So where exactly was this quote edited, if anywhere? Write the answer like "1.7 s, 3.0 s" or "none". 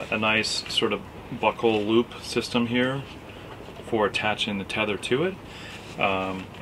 none